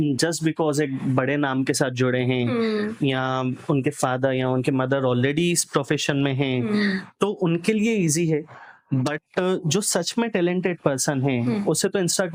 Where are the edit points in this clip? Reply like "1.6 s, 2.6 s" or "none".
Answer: none